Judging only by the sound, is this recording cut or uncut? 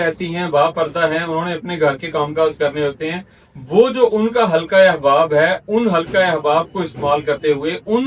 uncut